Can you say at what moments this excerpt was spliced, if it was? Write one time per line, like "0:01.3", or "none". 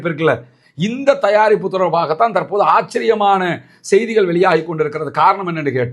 none